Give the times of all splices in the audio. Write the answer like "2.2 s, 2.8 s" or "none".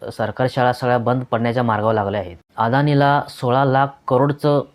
2.4 s

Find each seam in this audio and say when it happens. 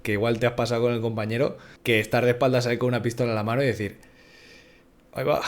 1.7 s

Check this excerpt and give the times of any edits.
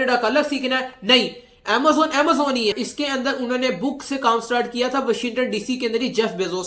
2.8 s

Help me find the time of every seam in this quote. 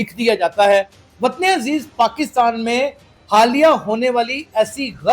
1.0 s

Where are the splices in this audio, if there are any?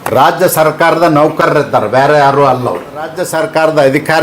3.2 s

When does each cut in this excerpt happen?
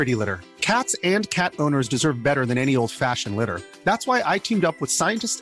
none

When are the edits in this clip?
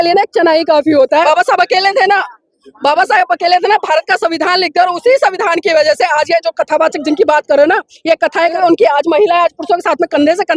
1.2 s, 8.5 s

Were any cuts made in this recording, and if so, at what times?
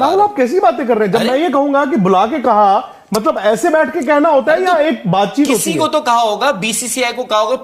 none

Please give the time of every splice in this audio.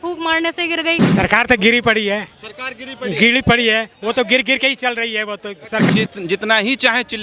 1.1 s, 5.9 s

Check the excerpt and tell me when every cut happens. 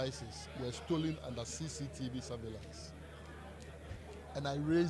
none

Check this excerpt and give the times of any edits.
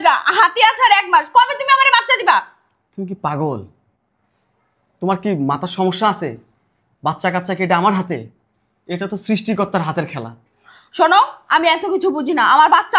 none

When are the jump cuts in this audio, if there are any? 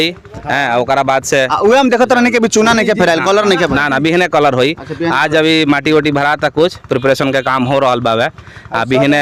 none

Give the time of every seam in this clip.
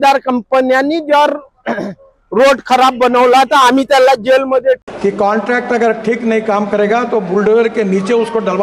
4.8 s

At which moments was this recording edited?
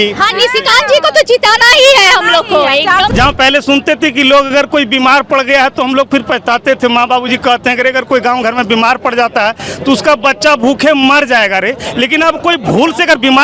3.1 s

